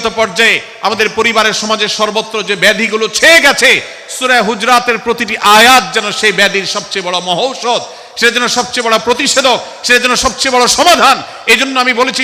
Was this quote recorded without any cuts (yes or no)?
yes